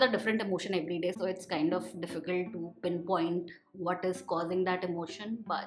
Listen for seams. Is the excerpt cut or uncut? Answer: uncut